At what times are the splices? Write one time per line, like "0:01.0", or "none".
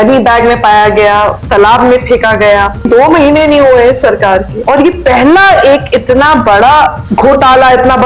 0:02.9
0:04.5
0:07.0